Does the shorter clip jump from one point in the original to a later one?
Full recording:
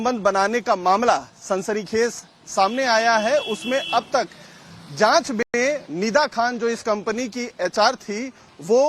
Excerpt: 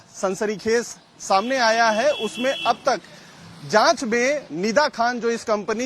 yes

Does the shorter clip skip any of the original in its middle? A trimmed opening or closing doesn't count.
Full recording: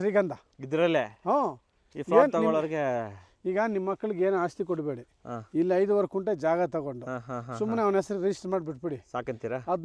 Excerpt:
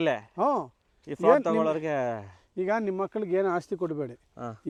no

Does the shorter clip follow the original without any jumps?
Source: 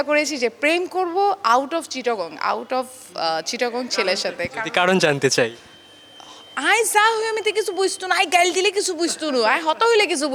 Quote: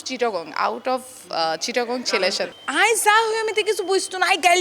no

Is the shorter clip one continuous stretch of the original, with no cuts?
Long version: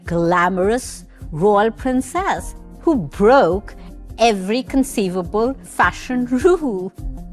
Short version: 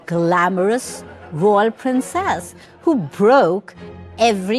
yes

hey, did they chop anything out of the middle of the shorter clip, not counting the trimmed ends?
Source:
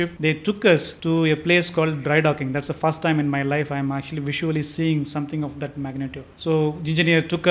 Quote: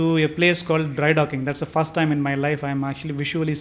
no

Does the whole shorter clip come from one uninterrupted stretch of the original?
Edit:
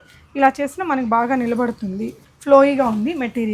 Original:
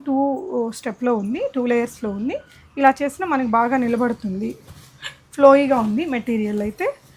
no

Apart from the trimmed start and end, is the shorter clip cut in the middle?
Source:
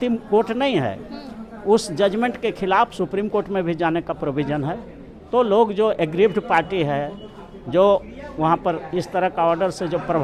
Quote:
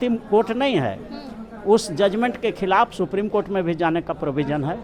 no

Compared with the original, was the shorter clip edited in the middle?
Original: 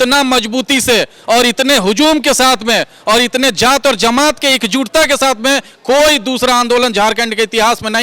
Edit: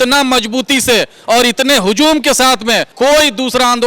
yes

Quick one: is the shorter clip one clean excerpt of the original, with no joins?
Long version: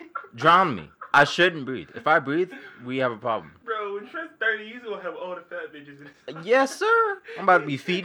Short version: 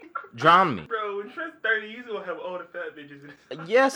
no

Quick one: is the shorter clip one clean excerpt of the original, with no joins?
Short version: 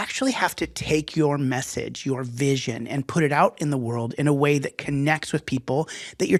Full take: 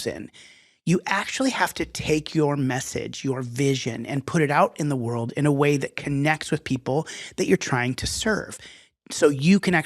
yes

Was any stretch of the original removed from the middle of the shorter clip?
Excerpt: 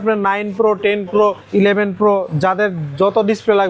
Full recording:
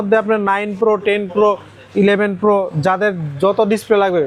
yes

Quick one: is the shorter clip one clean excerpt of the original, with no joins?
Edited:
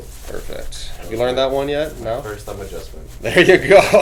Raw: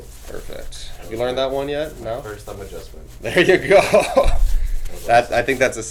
yes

